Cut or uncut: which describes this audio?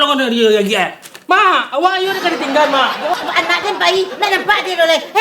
cut